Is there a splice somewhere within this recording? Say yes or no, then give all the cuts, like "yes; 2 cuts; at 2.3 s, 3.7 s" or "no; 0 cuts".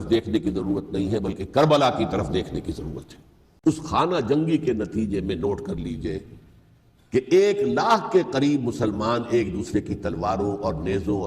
yes; 1 cut; at 3.6 s